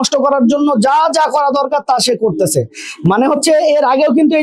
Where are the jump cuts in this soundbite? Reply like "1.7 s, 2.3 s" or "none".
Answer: none